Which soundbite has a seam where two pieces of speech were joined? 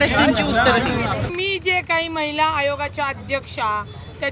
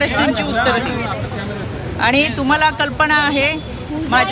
first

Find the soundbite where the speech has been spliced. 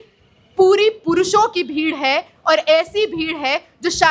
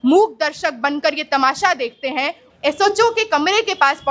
second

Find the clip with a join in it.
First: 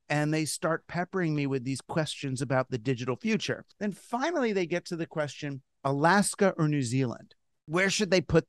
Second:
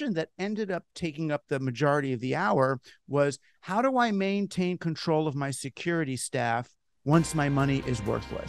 first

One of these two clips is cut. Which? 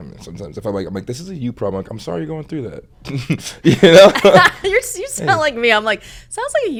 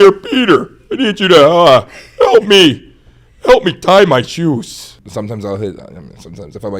second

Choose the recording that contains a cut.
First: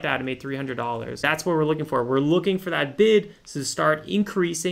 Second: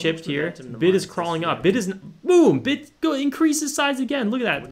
first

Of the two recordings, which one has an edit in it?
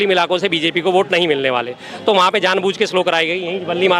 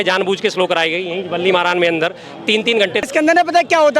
second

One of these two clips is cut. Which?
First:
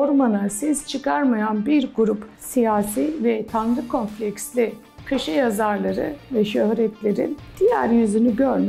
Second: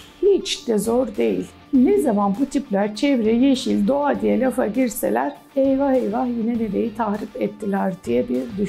second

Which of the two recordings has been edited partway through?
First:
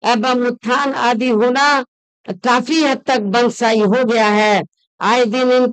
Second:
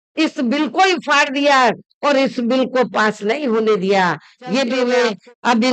second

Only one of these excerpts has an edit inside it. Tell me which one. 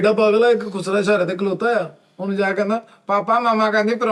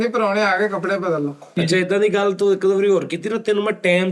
second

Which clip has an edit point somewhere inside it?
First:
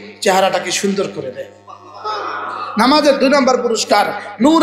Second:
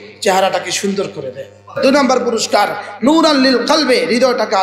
second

